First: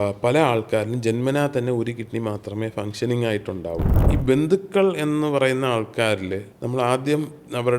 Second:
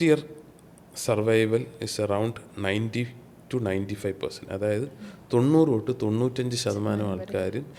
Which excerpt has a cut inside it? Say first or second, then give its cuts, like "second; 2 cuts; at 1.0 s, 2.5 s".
first; 2 cuts; at 3.9 s, 6.5 s